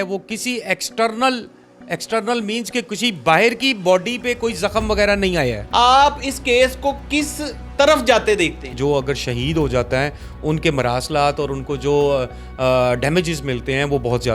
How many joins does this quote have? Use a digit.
2